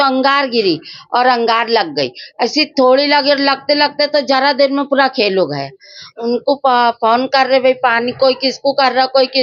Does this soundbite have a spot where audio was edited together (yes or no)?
no